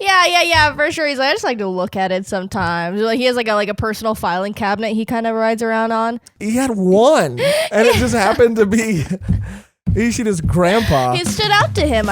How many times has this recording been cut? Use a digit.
1